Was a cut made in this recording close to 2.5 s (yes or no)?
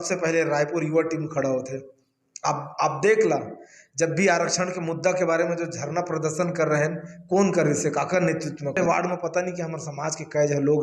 no